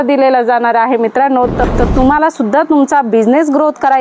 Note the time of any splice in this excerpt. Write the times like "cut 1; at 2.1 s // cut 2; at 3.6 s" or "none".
cut 1; at 1.6 s